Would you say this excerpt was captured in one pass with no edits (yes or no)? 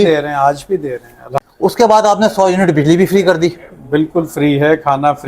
no